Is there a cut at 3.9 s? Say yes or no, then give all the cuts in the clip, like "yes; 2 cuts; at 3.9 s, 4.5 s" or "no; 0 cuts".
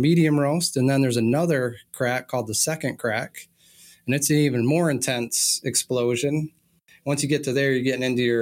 no; 1 cut; at 6.9 s